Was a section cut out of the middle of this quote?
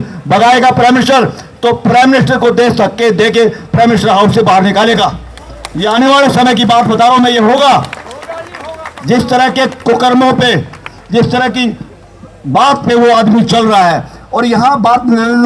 no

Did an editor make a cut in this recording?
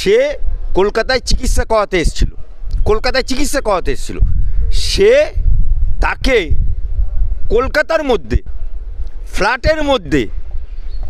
no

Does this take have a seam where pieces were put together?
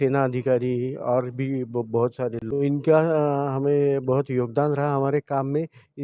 yes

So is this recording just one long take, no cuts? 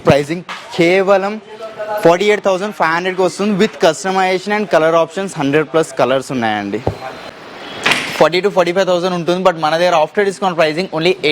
no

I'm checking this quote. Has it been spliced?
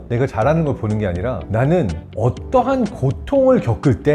yes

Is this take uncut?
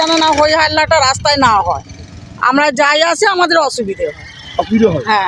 yes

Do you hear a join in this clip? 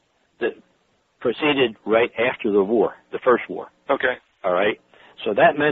yes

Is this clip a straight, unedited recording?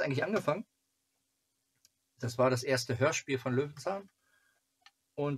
yes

